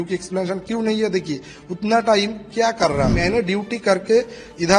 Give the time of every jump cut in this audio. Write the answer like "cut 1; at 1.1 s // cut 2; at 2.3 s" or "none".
cut 1; at 3.2 s